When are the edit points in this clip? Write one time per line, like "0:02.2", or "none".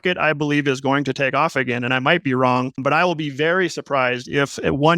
0:01.9
0:02.8

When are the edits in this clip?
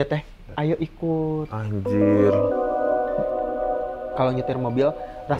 0:03.9

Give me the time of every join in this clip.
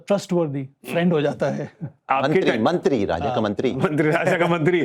none

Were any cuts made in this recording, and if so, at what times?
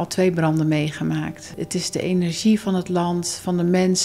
0:01.5

